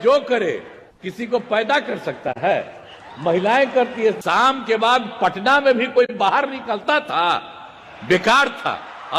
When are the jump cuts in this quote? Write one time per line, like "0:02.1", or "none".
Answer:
0:04.2